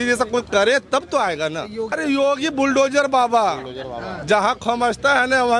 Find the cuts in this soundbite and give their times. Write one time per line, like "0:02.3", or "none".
0:01.9

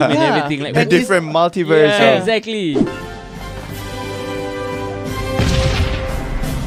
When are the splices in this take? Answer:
none

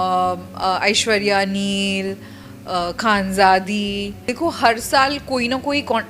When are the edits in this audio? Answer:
0:04.2

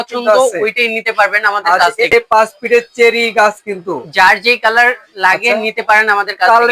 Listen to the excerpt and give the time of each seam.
0:02.1

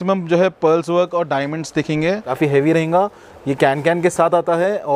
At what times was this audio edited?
0:02.3

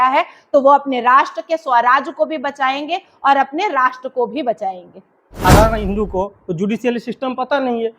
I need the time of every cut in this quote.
0:05.4

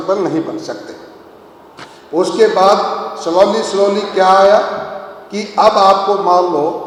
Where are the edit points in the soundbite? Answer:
none

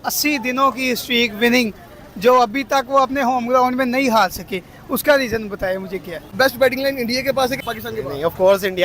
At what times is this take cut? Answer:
0:06.3
0:07.6

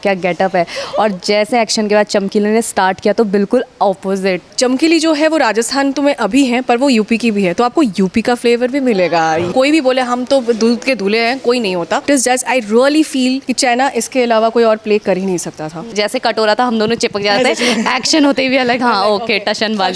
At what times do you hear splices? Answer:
0:04.5
0:09.5
0:12.0
0:13.5
0:15.9

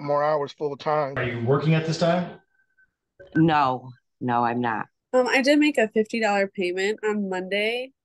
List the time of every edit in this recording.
0:01.2
0:04.9

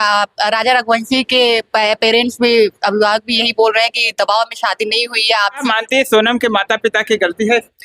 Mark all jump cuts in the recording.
0:05.6

